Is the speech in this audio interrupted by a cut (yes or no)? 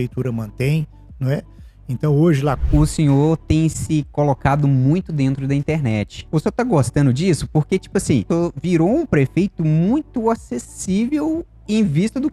yes